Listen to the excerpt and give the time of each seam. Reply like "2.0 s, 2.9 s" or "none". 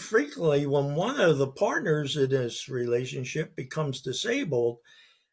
none